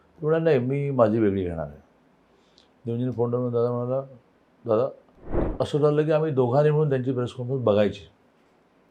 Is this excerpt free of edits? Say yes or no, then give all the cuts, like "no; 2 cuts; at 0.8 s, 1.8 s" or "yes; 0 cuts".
no; 1 cut; at 5.4 s